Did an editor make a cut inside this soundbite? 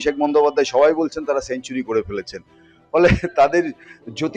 no; 0 cuts

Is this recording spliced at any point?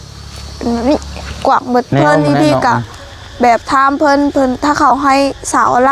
yes; 1 cut; at 1.9 s

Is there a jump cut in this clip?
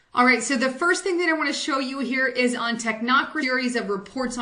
no; 0 cuts

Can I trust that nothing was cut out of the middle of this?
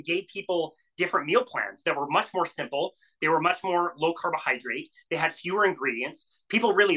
yes; 0 cuts

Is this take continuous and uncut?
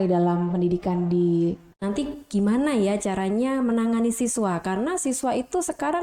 no; 1 cut; at 1.7 s

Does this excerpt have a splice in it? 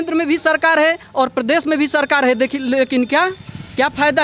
no; 0 cuts

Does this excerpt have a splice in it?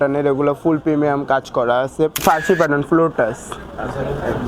yes; 1 cut; at 2.2 s

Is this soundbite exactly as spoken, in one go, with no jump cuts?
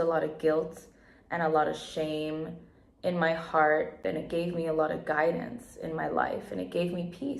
no; 1 cut; at 4.0 s

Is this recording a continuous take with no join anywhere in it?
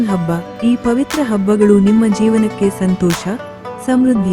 yes; 0 cuts

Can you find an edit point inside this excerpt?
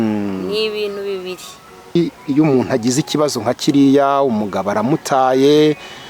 yes; 1 cut; at 2.0 s

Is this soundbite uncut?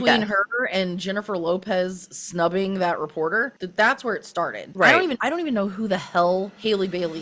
no; 3 cuts; at 3.6 s, 4.6 s, 5.2 s

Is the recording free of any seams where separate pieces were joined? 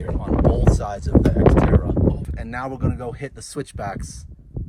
no; 1 cut; at 2.2 s

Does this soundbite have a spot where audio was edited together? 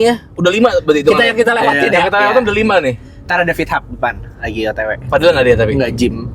yes; 1 cut; at 5.0 s

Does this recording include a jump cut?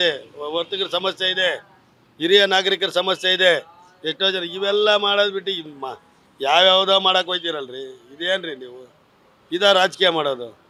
no; 0 cuts

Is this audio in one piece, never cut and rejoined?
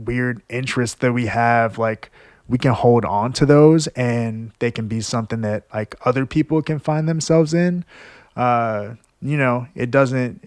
yes; 0 cuts

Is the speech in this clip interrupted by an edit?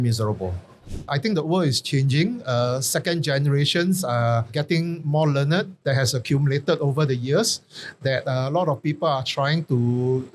yes; 2 cuts; at 1.1 s, 5.7 s

